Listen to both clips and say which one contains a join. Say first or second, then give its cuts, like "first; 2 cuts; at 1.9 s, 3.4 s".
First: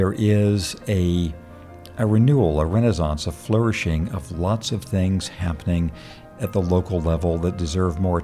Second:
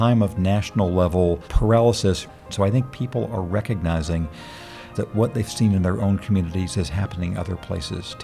second; 1 cut; at 2.3 s